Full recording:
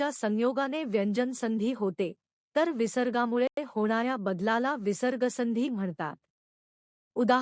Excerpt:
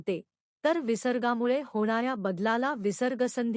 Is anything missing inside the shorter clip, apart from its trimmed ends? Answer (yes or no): yes